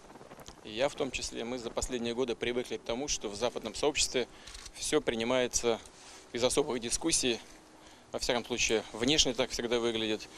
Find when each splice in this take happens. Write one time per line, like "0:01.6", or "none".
none